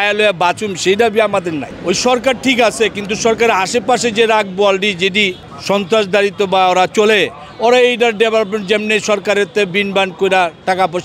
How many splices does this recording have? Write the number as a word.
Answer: two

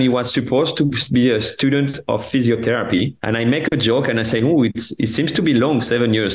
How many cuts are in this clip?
one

